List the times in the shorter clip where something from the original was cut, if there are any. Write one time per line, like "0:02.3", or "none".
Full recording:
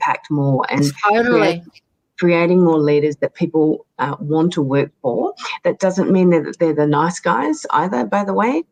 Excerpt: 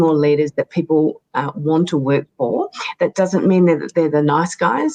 none